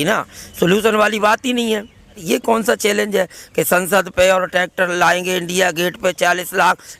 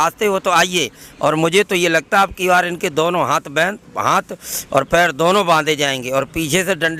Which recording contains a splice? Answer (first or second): first